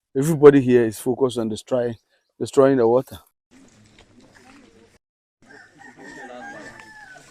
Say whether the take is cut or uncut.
uncut